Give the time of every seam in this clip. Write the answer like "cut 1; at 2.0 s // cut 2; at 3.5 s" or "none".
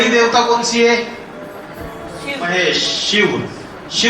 cut 1; at 2.5 s